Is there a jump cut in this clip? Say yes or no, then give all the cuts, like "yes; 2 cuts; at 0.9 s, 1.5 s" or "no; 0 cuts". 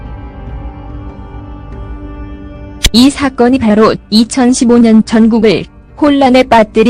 no; 0 cuts